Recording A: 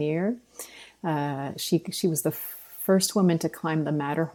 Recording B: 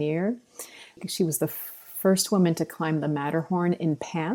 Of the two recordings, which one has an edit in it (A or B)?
B